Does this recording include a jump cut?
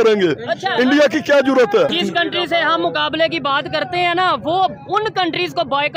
yes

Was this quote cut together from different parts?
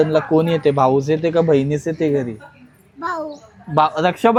no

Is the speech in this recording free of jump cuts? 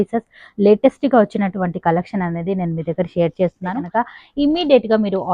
no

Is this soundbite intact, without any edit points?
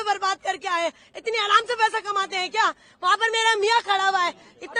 yes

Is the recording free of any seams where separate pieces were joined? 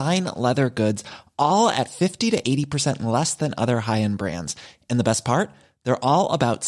yes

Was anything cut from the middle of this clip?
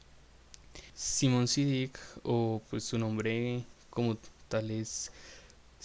yes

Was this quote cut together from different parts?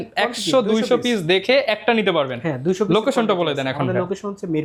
no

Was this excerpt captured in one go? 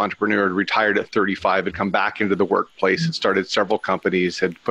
yes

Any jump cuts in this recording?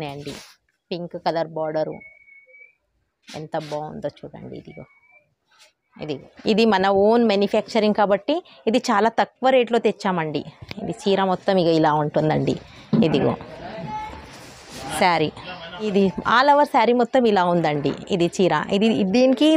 yes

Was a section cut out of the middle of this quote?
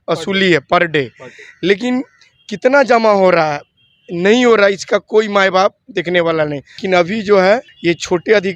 yes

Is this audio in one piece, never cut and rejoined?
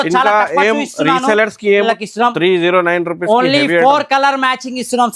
no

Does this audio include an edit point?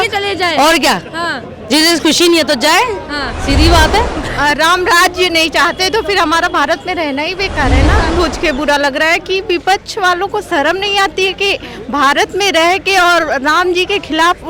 yes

